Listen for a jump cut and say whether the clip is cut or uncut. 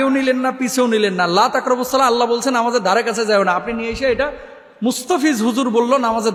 uncut